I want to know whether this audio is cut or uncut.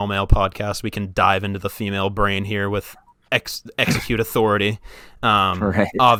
uncut